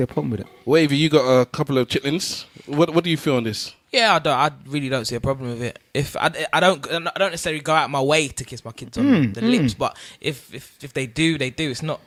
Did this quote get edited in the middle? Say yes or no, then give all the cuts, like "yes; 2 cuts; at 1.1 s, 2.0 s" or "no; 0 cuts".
no; 0 cuts